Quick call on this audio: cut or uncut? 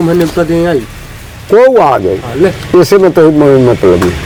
uncut